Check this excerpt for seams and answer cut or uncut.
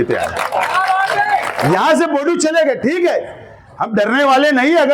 cut